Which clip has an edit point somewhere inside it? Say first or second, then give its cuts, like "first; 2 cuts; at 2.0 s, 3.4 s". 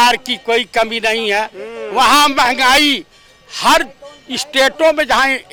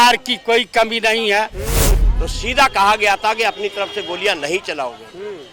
second; 1 cut; at 1.9 s